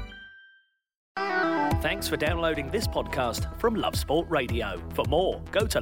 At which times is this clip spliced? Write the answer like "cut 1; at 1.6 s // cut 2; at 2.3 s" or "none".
cut 1; at 1.0 s

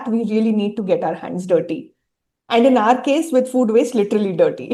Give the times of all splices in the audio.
none

